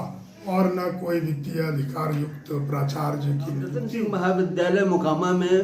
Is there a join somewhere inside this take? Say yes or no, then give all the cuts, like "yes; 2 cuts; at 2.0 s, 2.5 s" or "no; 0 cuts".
yes; 1 cut; at 3.9 s